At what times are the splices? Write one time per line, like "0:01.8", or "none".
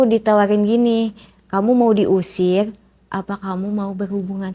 none